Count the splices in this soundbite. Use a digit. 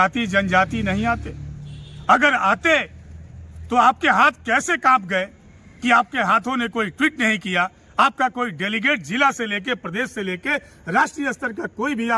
0